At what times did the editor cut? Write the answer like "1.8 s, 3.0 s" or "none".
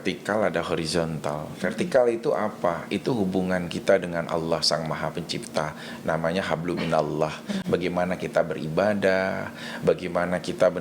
none

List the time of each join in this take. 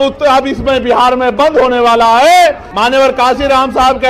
2.7 s

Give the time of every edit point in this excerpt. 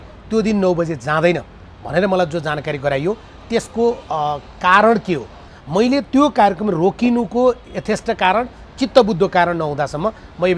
5.5 s

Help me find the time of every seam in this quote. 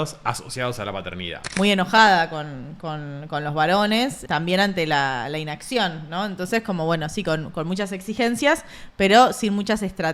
1.4 s, 4.2 s

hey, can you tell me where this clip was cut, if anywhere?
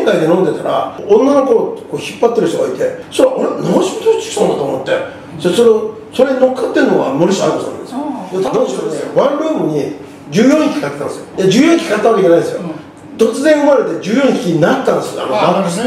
0.9 s, 3.0 s, 8.5 s

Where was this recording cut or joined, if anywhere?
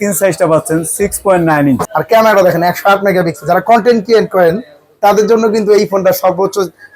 1.9 s

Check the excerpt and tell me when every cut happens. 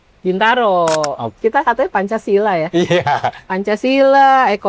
1.2 s

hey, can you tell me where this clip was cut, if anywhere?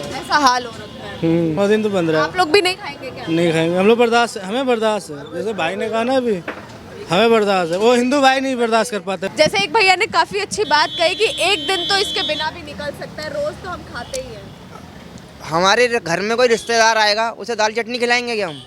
1.6 s, 9.3 s

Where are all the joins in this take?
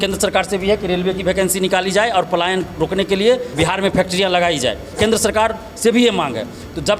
3.5 s, 4.9 s

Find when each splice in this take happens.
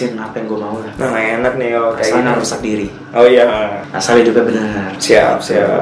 3.9 s, 4.9 s

